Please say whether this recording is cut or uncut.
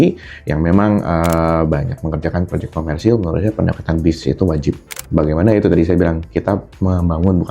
cut